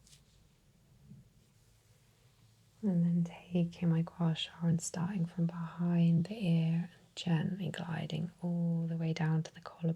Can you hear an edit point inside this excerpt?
yes; 1 cut; at 1.5 s

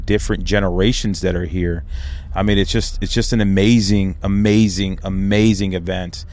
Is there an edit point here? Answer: no; 0 cuts

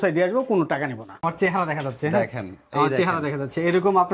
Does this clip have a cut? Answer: yes; 1 cut; at 1.2 s

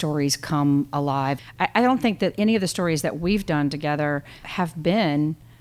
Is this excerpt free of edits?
no; 2 cuts; at 1.4 s, 4.5 s

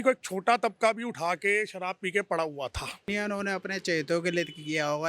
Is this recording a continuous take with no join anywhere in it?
no; 1 cut; at 3.1 s

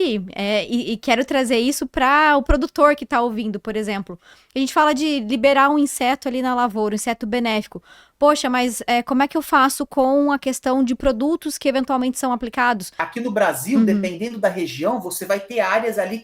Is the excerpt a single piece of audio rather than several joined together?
no; 1 cut; at 13.0 s

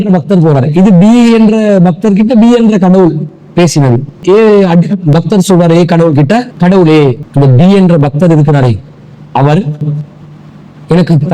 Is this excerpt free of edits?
no; 3 cuts; at 4.2 s, 6.5 s, 7.2 s

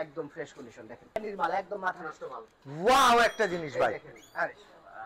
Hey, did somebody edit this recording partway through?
yes; 1 cut; at 1.2 s

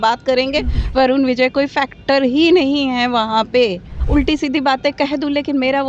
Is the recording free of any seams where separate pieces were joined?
no; 1 cut; at 3.9 s

